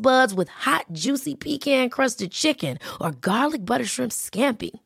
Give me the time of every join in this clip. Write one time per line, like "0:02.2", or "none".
none